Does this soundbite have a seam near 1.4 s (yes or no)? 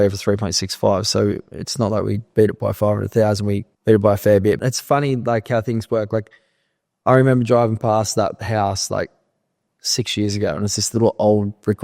no